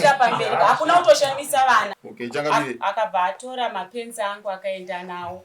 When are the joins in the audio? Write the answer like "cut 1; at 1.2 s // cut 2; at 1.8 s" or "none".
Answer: cut 1; at 2.0 s